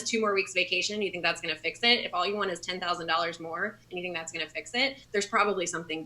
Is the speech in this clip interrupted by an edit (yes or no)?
yes